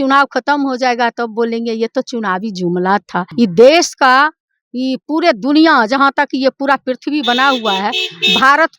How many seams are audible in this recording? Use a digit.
1